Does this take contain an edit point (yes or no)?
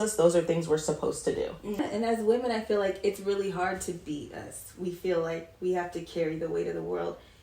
yes